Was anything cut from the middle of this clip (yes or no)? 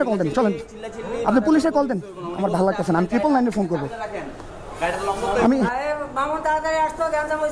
yes